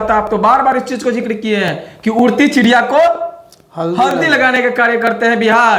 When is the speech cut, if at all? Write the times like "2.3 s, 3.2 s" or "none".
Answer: none